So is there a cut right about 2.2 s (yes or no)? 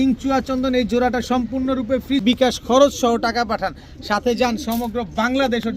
yes